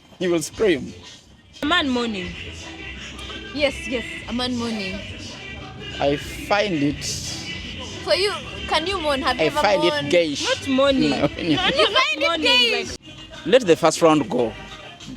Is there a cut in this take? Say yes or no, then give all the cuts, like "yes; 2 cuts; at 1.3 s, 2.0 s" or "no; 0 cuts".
yes; 2 cuts; at 1.6 s, 12.9 s